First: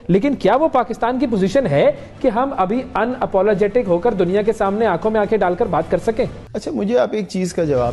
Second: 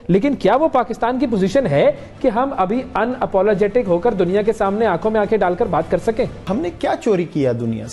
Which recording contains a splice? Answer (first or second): second